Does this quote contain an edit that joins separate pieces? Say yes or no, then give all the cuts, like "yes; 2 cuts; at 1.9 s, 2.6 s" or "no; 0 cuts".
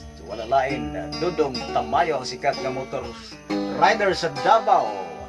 no; 0 cuts